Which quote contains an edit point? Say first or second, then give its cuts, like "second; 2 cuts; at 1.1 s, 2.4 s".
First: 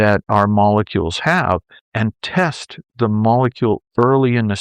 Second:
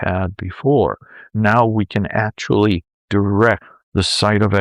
second; 1 cut; at 1.3 s